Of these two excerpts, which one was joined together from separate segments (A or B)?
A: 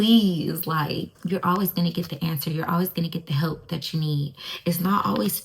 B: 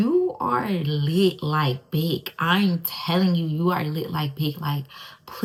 A